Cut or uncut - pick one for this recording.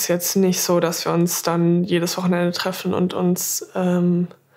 uncut